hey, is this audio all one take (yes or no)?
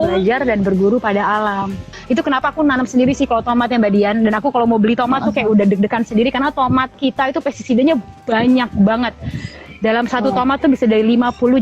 no